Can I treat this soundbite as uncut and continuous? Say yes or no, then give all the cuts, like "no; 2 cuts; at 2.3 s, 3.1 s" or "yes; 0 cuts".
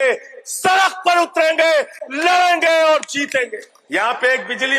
no; 1 cut; at 3.6 s